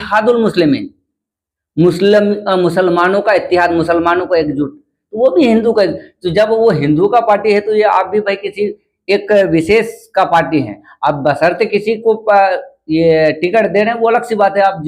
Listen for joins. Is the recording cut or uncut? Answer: uncut